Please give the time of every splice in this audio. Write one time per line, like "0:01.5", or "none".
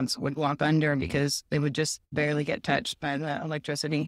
0:02.1